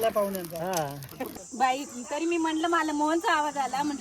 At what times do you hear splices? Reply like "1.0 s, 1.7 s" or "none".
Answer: 1.4 s